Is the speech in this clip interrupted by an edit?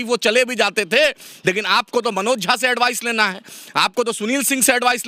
no; 0 cuts

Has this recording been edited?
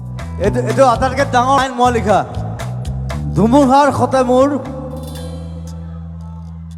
yes; 1 cut; at 1.6 s

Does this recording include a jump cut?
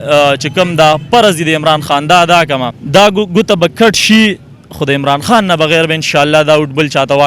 yes; 1 cut; at 2.7 s

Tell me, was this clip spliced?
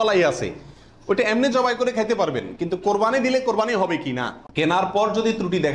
yes; 1 cut; at 4.4 s

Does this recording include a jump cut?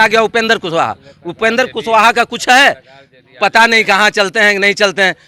no; 0 cuts

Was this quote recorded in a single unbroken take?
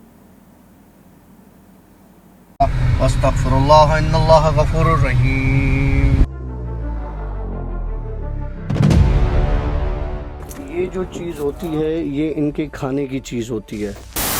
no; 1 cut; at 2.6 s

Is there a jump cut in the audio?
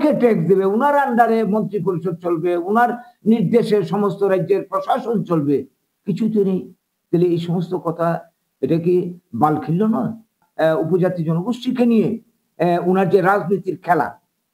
yes; 1 cut; at 10.4 s

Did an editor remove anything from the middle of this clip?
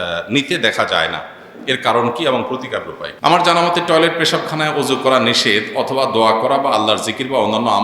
yes; 1 cut; at 3.0 s

